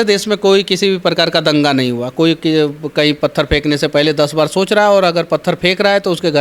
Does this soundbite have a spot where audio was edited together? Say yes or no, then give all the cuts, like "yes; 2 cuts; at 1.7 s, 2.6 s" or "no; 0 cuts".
no; 0 cuts